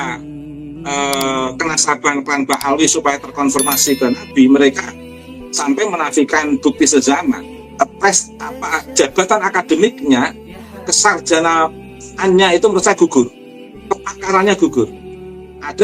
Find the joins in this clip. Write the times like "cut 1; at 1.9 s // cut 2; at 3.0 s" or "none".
cut 1; at 7.6 s